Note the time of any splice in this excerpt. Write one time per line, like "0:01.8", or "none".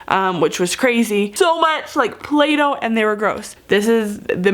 0:01.3
0:03.5